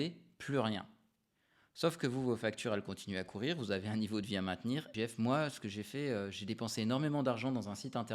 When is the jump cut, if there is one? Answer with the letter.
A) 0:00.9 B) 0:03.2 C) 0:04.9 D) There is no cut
C